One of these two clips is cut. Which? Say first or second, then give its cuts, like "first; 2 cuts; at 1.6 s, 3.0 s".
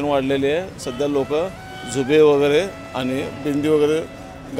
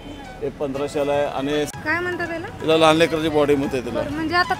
second; 1 cut; at 1.7 s